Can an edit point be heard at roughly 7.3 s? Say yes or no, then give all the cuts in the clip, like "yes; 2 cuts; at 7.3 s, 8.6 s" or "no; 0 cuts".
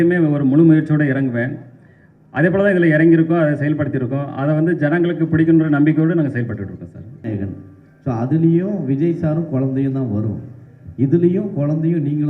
yes; 1 cut; at 7.3 s